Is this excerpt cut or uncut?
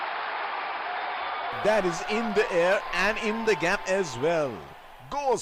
uncut